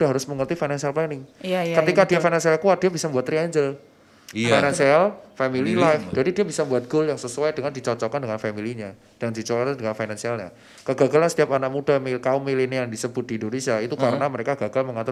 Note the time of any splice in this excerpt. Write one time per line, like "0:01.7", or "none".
none